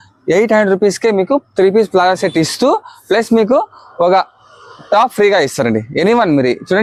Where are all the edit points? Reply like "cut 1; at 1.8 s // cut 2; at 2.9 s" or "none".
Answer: none